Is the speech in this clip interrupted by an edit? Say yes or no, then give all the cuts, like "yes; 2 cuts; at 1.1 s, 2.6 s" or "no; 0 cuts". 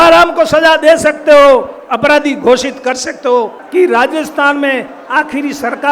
yes; 1 cut; at 3.6 s